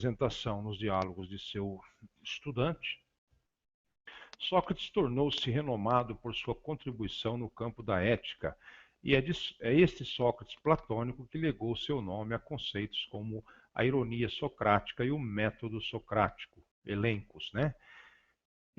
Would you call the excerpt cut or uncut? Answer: uncut